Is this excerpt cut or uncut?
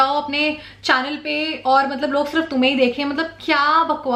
uncut